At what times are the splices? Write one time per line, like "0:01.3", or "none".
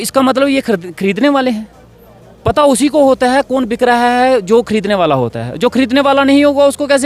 none